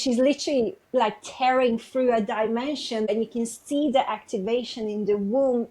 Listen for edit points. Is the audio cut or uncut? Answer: cut